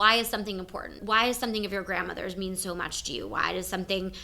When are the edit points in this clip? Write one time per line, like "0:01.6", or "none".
0:01.0